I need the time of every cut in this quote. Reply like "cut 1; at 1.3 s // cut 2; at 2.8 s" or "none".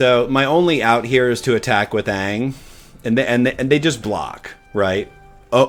none